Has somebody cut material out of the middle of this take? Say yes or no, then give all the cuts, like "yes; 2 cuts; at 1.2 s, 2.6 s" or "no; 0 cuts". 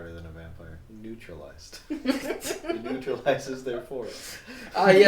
yes; 1 cut; at 0.9 s